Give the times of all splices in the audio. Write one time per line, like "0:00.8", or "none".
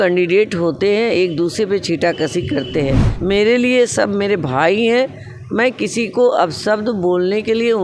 0:03.1